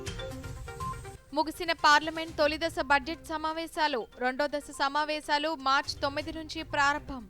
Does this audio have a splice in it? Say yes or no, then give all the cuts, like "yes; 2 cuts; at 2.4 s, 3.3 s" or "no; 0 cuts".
yes; 1 cut; at 1.2 s